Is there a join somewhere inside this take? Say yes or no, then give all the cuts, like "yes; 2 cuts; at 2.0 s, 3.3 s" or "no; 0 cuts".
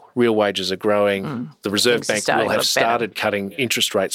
no; 0 cuts